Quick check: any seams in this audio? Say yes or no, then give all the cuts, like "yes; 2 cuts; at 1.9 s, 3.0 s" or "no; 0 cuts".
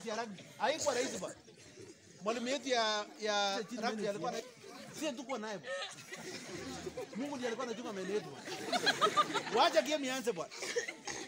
yes; 1 cut; at 4.4 s